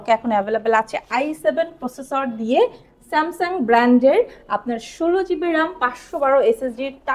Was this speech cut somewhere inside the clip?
no; 0 cuts

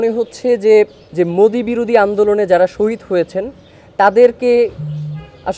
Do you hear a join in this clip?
yes; 1 cut; at 1.0 s

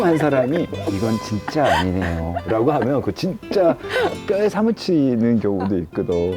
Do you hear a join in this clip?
no; 0 cuts

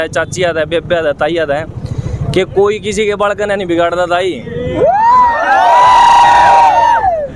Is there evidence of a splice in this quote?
no; 0 cuts

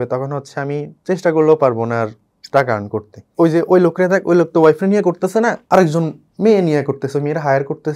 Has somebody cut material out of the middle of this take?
yes; 1 cut; at 3.2 s

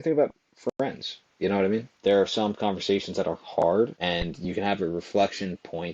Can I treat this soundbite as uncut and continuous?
no; 2 cuts; at 1.9 s, 4.0 s

